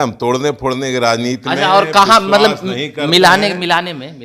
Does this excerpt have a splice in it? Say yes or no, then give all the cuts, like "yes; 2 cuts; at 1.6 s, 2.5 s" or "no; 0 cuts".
no; 0 cuts